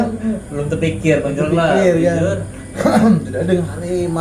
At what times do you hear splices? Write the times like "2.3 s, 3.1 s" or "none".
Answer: none